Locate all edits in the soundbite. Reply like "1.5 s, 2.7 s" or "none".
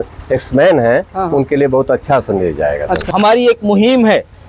3.1 s